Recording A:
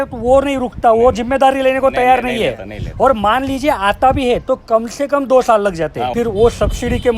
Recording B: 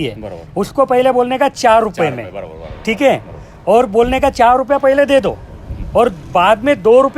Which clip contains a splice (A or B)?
A